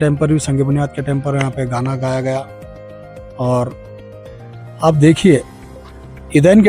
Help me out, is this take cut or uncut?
uncut